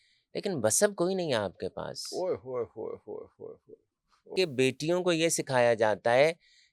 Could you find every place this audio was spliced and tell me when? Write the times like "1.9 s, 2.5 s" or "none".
4.3 s